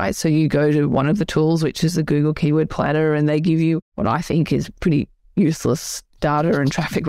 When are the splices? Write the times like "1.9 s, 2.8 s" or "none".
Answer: 3.9 s